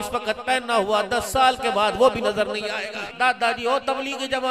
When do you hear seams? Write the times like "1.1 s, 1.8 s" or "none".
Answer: 3.0 s

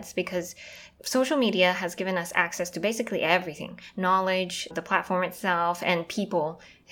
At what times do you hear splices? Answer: 0.9 s, 4.7 s

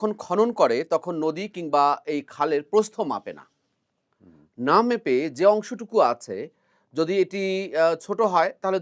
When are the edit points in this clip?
none

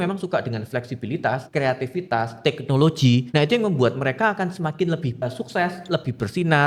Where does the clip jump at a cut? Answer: 1.5 s, 3.3 s, 5.3 s

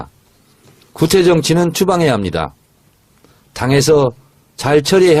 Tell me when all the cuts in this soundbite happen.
4.2 s

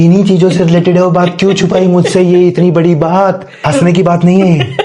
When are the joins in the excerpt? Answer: 3.5 s

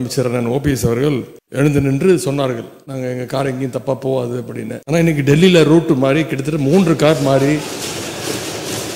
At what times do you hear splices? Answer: 1.4 s, 2.8 s, 4.8 s

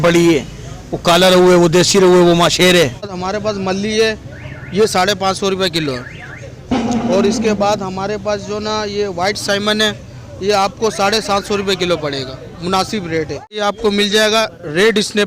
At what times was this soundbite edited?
3.2 s, 13.4 s

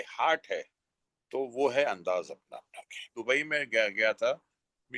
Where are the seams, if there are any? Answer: 3.1 s

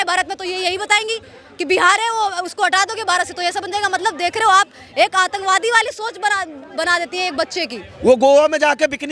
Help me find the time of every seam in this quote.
7.8 s

